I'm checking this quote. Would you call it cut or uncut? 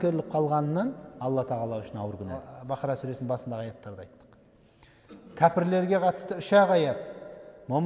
cut